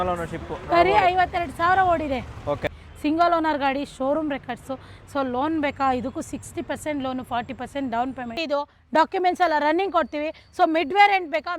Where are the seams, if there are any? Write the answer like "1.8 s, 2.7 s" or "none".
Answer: 2.6 s, 8.4 s

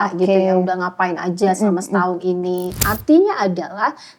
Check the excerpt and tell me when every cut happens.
2.8 s

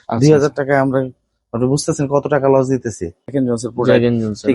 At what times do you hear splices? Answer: 3.3 s

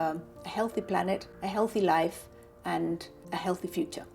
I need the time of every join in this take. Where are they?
1.3 s, 3.1 s

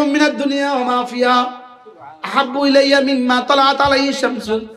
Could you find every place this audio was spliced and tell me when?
none

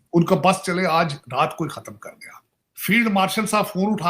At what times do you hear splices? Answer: 2.8 s

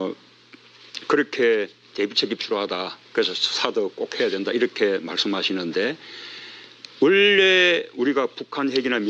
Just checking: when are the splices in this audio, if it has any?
3.6 s

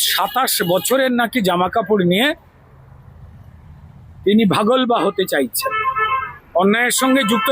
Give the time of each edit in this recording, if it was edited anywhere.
6.3 s

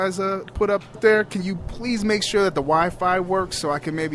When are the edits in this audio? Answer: 1.0 s

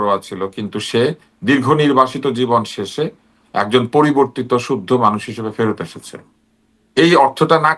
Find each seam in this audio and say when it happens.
none

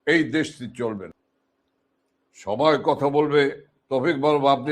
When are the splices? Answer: 1.1 s

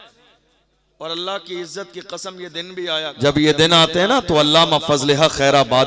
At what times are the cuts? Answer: 3.0 s

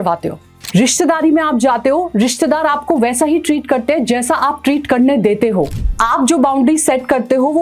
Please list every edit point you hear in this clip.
none

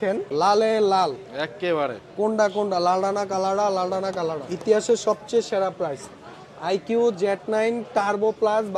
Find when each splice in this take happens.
4.5 s

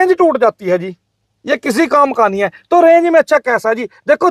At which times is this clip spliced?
none

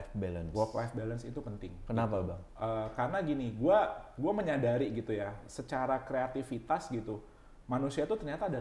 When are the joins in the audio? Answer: none

